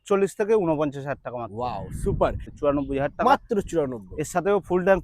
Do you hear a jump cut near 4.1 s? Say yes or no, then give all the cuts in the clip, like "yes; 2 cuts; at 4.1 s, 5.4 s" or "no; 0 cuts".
no; 1 cut; at 2.4 s